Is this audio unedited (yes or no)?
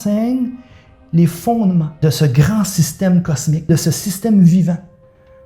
no